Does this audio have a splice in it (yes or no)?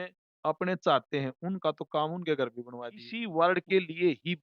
yes